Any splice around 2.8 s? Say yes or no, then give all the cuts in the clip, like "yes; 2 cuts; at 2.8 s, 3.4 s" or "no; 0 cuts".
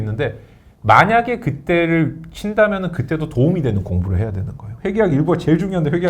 no; 1 cut; at 4.7 s